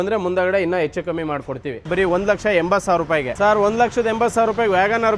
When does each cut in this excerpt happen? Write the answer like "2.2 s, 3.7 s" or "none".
1.8 s, 3.3 s